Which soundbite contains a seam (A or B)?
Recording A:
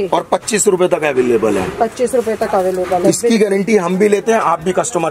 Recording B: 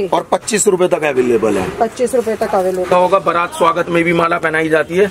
B